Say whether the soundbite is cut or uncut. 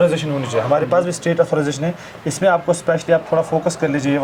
uncut